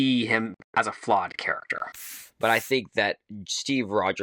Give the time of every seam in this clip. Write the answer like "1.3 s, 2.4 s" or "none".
2.2 s